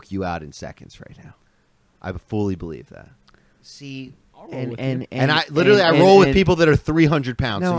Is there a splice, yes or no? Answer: no